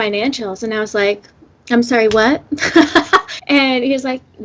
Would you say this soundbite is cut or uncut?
cut